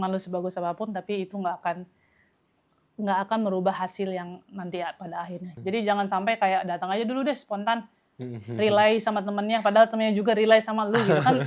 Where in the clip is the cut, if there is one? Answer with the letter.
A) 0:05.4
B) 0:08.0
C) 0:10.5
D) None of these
A